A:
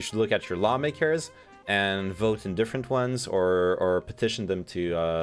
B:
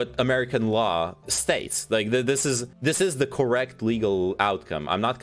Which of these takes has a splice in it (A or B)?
B